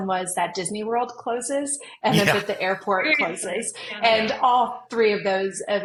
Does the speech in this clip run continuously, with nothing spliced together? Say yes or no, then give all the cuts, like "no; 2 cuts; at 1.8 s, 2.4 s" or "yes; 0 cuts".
yes; 0 cuts